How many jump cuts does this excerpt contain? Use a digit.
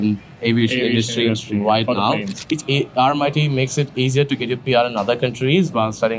1